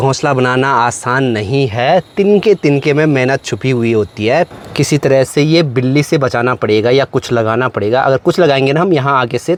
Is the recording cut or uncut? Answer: uncut